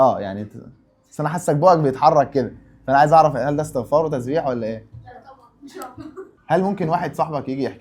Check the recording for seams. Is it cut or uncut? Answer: cut